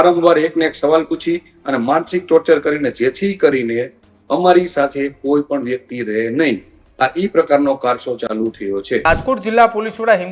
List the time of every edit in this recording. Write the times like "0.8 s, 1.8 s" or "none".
9.0 s

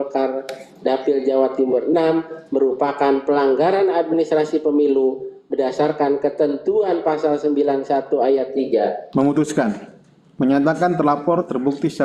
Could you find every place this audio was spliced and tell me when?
9.0 s

